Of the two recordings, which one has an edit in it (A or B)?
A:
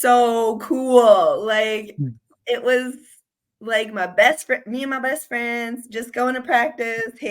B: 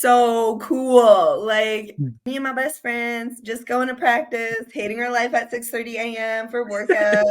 B